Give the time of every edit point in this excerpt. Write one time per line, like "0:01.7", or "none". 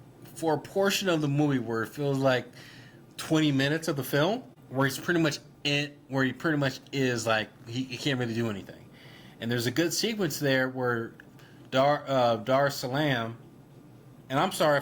0:04.6